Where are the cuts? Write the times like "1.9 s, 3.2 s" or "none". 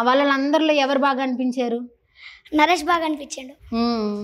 none

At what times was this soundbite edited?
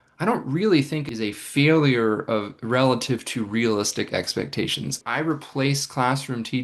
1.1 s, 5.0 s

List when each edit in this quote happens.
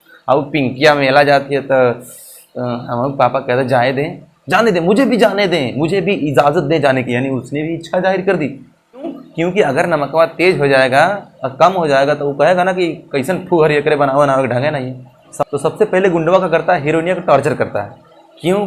9.2 s, 15.3 s

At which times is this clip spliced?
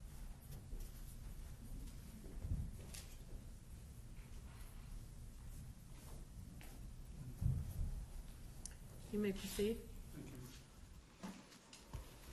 none

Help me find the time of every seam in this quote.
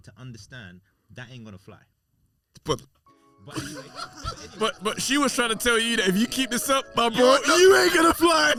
none

